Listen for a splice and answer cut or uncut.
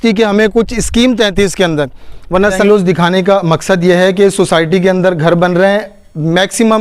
cut